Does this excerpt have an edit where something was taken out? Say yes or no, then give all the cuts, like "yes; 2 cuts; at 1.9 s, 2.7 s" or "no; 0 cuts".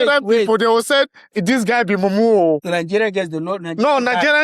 yes; 1 cut; at 2.6 s